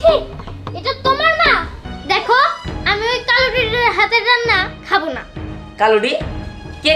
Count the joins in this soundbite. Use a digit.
1